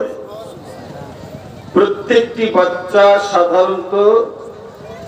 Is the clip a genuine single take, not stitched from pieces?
yes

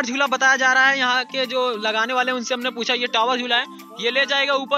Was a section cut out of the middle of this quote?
no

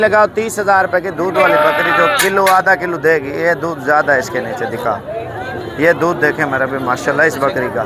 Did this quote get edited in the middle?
no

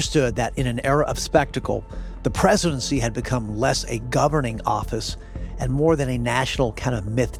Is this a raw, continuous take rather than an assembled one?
yes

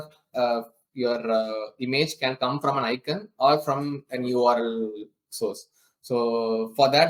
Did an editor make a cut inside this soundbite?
no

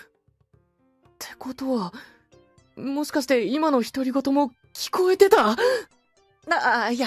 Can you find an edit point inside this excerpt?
yes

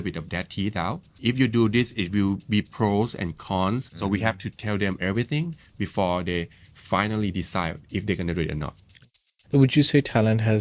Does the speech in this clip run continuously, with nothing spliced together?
no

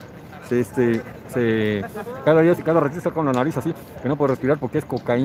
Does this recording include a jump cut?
no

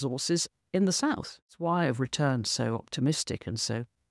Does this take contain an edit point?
yes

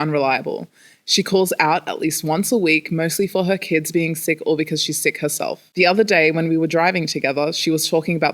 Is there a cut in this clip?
yes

